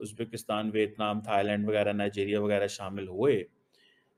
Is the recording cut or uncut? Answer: uncut